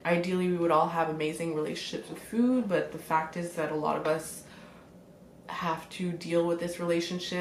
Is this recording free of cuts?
yes; 0 cuts

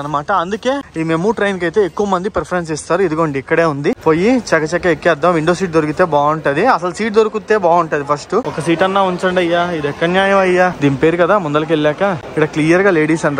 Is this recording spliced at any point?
yes; 5 cuts; at 0.9 s, 4.0 s, 8.5 s, 10.8 s, 12.2 s

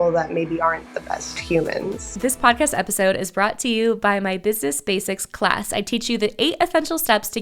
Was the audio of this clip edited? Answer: yes; 1 cut; at 2.0 s

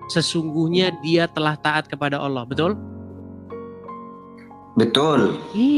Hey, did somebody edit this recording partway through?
no; 0 cuts

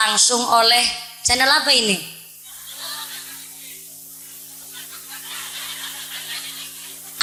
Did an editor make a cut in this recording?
no; 0 cuts

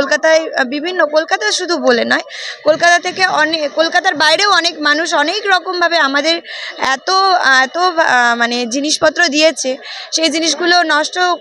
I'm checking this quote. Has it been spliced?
no; 0 cuts

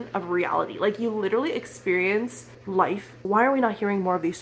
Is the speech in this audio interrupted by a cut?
yes; 1 cut; at 3.1 s

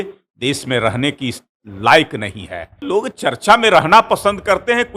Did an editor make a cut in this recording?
yes; 1 cut; at 2.8 s

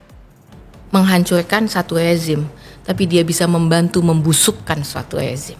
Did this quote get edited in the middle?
no; 0 cuts

